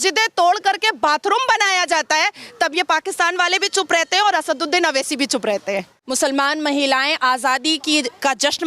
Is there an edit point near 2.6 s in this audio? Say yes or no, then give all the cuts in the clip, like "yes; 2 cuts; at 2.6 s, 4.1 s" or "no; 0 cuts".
no; 1 cut; at 6.0 s